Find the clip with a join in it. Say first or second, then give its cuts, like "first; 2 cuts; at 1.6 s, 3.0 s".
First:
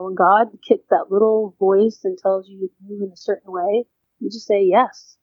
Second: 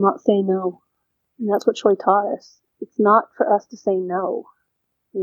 first; 1 cut; at 4.0 s